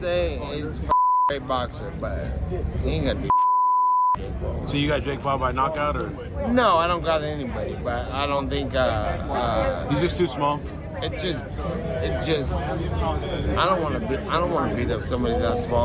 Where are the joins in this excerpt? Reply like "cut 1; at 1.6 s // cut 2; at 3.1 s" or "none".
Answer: none